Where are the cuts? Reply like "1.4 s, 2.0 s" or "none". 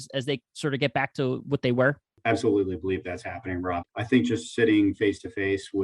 2.1 s, 3.8 s